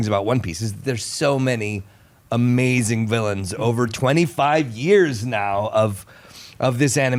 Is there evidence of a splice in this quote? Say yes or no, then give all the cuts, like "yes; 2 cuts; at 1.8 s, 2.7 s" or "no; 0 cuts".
no; 0 cuts